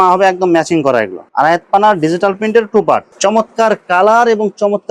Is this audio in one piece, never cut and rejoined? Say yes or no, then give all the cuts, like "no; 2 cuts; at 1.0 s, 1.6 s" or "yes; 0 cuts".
yes; 0 cuts